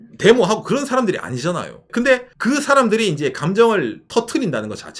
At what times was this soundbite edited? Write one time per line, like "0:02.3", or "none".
0:02.0
0:04.1